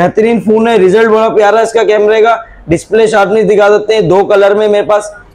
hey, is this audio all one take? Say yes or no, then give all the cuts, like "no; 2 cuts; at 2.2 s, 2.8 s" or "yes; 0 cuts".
yes; 0 cuts